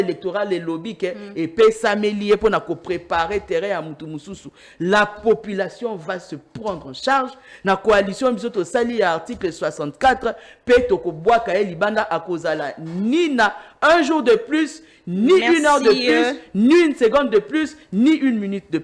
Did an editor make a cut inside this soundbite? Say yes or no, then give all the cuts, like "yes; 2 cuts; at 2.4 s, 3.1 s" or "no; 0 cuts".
no; 0 cuts